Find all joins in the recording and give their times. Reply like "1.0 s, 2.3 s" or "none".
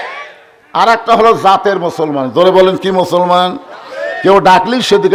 none